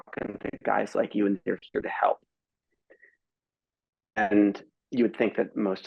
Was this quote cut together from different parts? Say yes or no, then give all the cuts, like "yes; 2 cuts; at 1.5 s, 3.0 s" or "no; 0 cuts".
no; 0 cuts